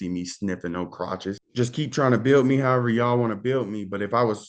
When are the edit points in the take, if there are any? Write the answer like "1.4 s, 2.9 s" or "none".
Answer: 1.4 s